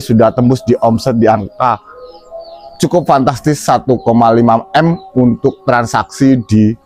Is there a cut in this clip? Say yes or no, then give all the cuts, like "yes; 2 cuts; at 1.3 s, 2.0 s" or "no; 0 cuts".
no; 0 cuts